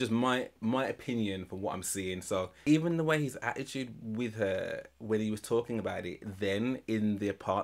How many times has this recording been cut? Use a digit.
1